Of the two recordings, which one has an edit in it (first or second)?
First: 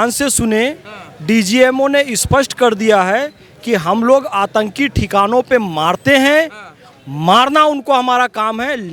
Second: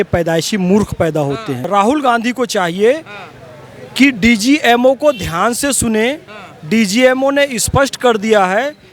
second